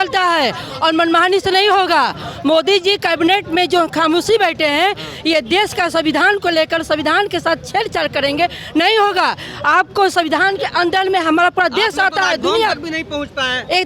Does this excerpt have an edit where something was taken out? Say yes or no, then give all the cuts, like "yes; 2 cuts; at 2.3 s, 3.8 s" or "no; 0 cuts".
no; 0 cuts